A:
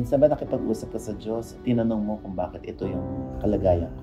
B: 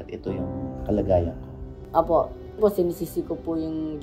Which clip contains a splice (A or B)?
B